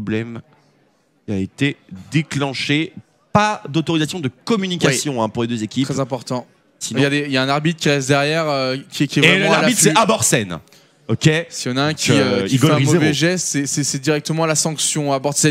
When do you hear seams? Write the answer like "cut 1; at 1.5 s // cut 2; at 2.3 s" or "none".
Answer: cut 1; at 7.1 s